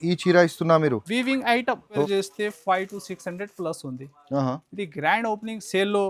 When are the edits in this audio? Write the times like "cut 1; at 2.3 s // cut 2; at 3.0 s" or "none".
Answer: cut 1; at 2.0 s